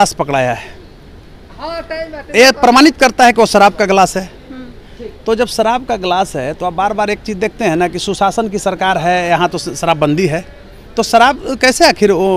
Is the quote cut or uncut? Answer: uncut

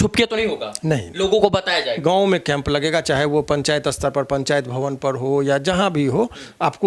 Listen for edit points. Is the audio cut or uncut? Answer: cut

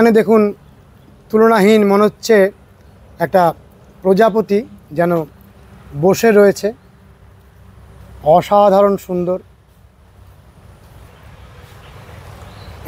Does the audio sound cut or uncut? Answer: cut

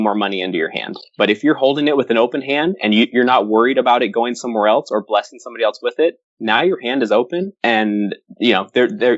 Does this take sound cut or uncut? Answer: uncut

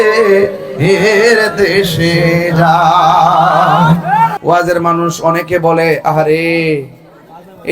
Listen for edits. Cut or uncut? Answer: cut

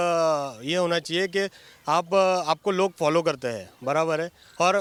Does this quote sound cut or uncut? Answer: uncut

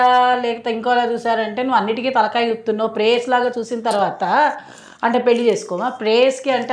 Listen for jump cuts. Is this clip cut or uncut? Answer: uncut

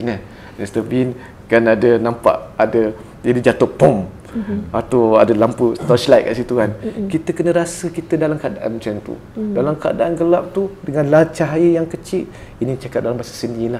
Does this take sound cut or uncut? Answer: uncut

